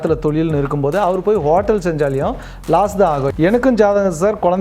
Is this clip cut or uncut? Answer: cut